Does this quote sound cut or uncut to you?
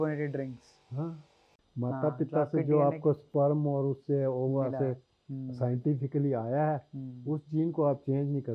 cut